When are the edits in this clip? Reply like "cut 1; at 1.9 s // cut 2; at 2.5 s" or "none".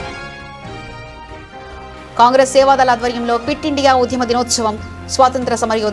cut 1; at 1.6 s